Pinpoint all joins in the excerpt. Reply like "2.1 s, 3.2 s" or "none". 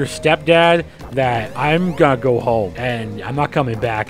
2.8 s